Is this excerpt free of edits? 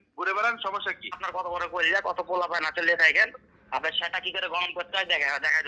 no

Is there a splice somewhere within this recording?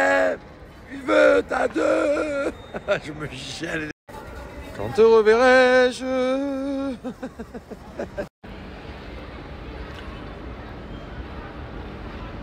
yes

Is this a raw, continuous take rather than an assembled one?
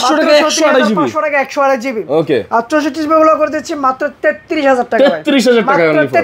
yes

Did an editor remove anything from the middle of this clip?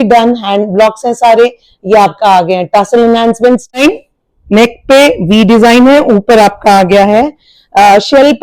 yes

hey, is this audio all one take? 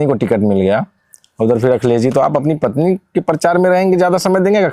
yes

